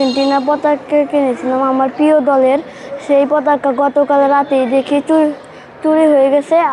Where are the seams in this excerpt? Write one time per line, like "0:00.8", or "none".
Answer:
none